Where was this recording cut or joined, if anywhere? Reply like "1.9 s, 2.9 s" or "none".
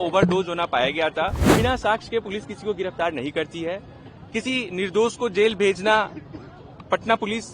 1.4 s